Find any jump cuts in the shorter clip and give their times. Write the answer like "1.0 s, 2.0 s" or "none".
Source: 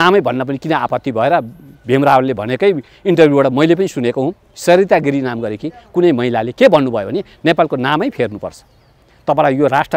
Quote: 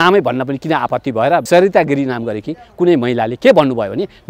1.4 s